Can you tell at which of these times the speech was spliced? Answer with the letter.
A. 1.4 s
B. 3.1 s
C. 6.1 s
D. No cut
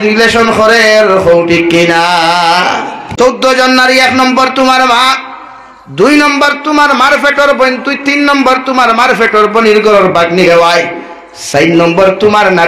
B